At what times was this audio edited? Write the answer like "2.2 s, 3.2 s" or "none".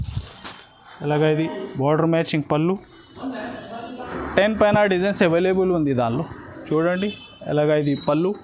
4.1 s